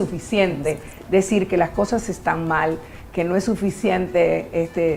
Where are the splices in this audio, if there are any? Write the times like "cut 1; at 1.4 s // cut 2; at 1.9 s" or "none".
none